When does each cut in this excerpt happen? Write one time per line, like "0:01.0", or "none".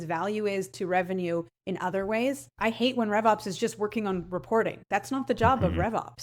0:02.5